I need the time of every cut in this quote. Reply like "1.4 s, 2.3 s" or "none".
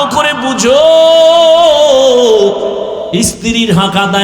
3.0 s